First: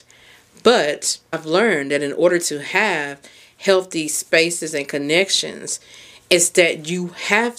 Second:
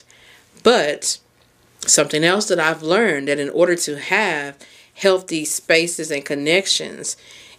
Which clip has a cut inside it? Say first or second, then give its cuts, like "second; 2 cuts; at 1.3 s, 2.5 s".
first; 1 cut; at 1.4 s